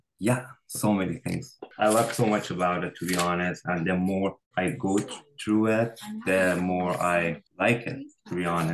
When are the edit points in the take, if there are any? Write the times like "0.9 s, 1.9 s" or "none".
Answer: none